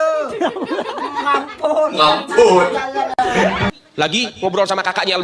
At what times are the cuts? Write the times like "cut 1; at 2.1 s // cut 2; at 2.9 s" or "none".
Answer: none